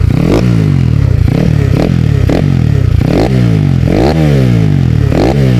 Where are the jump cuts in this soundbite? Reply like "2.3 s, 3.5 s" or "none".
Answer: none